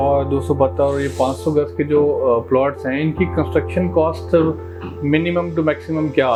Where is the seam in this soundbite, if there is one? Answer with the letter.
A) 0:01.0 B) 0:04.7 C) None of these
C